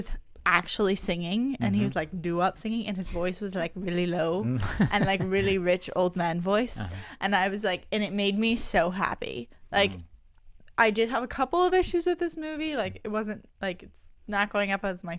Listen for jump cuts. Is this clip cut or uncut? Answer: cut